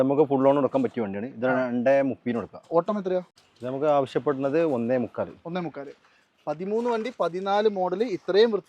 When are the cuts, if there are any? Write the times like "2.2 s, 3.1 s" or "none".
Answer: 3.3 s